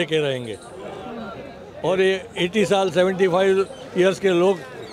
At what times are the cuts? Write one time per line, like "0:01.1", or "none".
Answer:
0:01.6